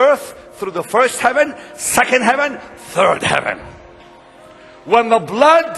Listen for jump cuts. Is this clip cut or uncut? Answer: uncut